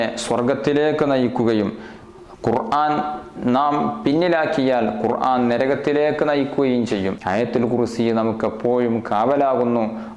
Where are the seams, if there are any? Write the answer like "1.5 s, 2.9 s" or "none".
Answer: 7.2 s